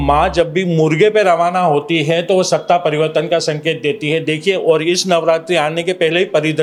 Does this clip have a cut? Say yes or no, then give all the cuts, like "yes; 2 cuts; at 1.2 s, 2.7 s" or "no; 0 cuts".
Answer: no; 0 cuts